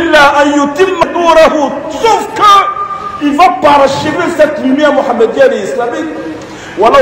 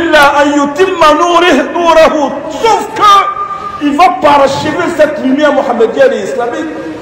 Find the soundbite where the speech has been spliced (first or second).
first